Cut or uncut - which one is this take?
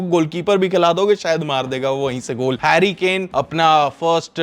cut